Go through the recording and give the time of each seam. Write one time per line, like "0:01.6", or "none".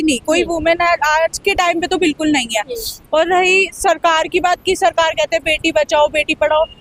none